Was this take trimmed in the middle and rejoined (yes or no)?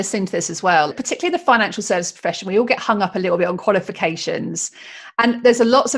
yes